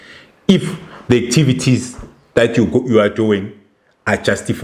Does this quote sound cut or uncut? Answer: uncut